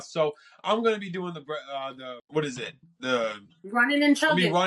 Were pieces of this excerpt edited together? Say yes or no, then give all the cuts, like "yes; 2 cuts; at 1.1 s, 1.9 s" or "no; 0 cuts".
no; 0 cuts